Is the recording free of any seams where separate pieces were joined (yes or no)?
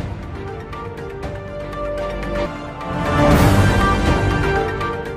no